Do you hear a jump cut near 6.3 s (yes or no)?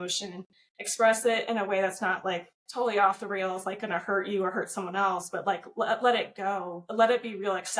no